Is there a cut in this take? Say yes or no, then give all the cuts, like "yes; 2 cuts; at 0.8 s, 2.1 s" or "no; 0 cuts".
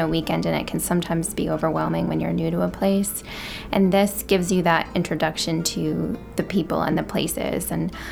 no; 0 cuts